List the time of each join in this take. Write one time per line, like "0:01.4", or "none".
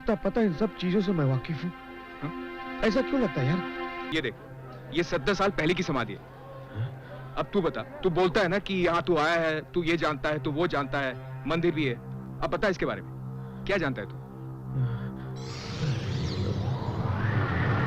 0:04.0